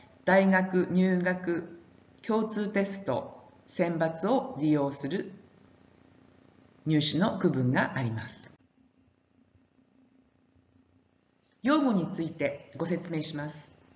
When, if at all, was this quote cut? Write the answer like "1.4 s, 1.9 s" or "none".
4.8 s

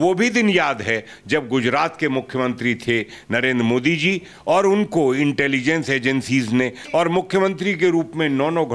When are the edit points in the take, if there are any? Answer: 6.8 s

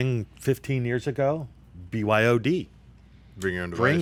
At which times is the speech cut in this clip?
none

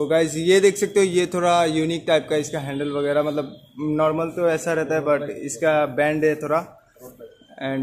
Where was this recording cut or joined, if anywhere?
none

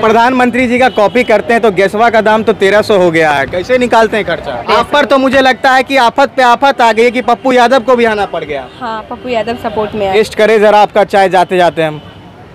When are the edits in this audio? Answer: 4.6 s, 10.1 s

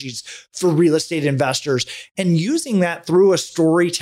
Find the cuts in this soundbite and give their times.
none

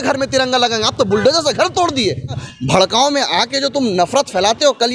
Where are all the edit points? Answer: 2.4 s

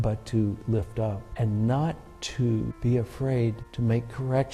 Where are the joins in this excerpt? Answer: 1.3 s, 2.7 s, 3.7 s

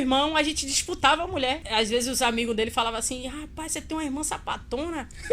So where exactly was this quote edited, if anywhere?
1.6 s

